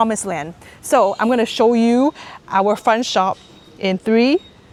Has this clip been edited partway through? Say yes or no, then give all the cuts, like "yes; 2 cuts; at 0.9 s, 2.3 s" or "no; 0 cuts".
no; 0 cuts